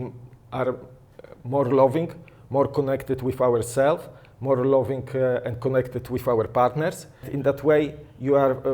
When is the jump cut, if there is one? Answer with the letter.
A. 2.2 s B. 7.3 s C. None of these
B